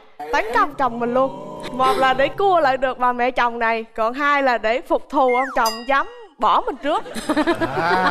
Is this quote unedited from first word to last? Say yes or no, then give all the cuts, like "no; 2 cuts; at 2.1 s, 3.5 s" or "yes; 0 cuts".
yes; 0 cuts